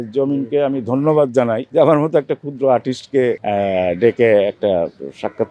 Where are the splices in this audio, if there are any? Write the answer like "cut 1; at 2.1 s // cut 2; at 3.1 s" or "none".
none